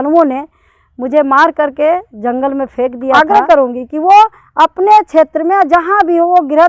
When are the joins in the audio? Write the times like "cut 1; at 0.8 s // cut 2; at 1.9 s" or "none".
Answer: cut 1; at 3.2 s